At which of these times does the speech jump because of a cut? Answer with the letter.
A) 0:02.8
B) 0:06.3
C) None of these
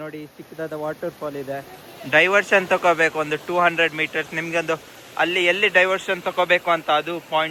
C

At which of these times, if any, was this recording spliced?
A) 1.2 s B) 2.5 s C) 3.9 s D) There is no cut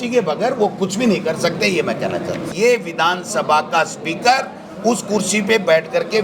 B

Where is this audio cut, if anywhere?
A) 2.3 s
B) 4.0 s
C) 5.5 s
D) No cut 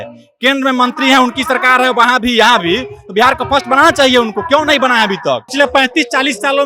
C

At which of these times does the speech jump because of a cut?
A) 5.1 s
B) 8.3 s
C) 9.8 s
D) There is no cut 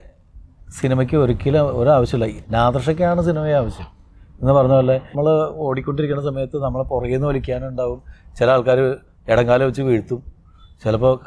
A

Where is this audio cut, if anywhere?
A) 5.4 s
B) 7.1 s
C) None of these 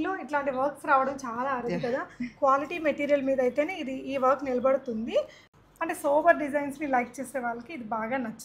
A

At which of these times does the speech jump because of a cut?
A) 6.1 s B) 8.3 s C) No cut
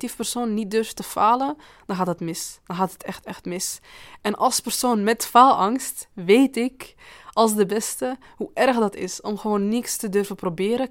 C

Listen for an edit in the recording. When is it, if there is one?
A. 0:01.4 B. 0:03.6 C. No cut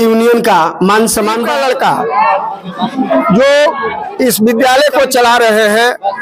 A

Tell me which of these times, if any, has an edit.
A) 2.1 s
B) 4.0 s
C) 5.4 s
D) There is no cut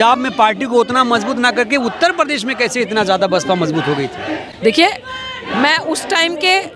D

